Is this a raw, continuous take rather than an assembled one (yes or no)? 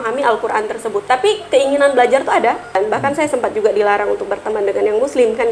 no